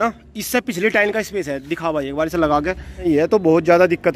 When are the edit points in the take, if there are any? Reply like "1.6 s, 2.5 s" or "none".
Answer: 3.1 s